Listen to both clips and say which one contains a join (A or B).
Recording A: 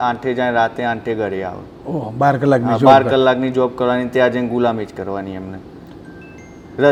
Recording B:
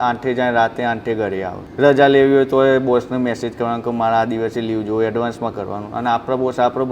B